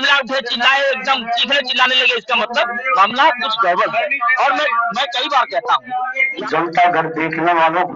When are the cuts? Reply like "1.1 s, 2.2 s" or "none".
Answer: 6.4 s